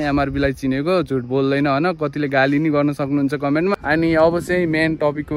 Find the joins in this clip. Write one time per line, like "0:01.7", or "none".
0:03.8